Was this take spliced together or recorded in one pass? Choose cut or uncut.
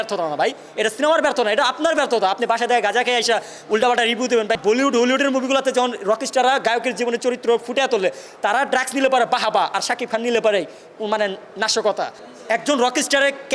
cut